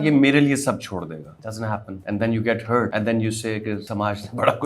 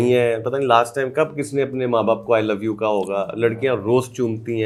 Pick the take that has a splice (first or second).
first